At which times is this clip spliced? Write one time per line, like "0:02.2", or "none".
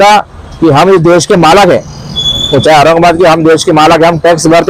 none